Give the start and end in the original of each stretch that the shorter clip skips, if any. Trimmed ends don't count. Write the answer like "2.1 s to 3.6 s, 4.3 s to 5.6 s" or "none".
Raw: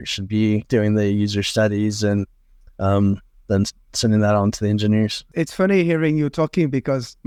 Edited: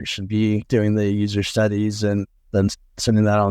2.4 s to 3.3 s